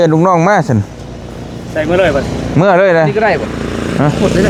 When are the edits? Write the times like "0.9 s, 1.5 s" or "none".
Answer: none